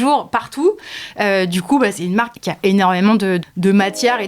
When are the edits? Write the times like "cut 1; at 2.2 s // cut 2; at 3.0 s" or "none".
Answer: cut 1; at 2.4 s // cut 2; at 3.4 s